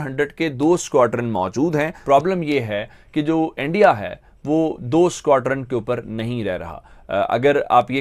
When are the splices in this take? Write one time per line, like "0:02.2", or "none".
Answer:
0:01.9